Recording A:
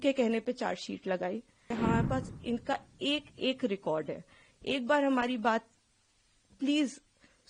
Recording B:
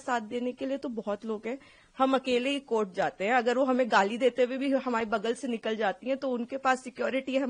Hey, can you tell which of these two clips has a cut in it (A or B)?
A